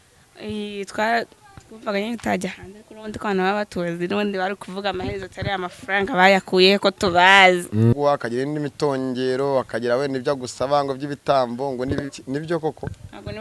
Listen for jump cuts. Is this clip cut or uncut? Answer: cut